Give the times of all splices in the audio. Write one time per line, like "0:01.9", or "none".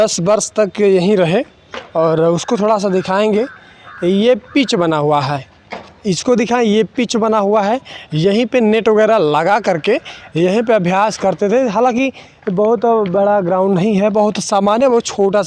none